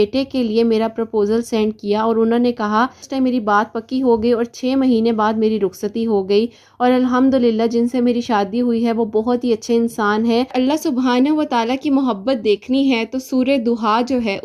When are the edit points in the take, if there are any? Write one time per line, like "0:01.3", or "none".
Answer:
0:03.0
0:10.5